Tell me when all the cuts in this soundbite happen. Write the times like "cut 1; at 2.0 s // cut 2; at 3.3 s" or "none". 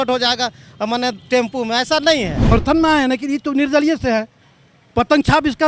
cut 1; at 2.5 s